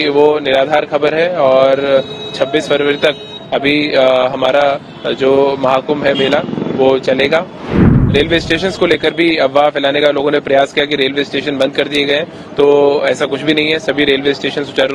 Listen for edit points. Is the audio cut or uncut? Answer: cut